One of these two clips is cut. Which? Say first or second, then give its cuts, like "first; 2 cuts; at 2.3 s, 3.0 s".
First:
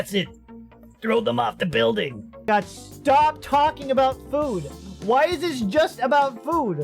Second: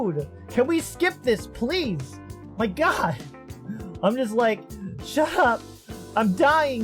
first; 1 cut; at 2.4 s